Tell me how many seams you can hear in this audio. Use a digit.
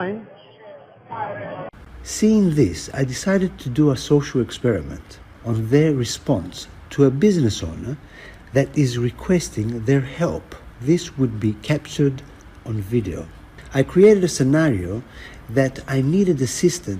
1